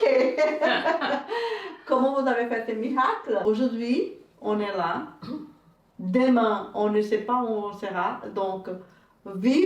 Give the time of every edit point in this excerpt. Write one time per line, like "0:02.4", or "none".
0:03.4